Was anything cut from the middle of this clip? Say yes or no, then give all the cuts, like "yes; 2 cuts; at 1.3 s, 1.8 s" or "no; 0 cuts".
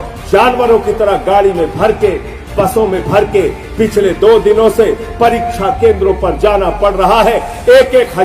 no; 0 cuts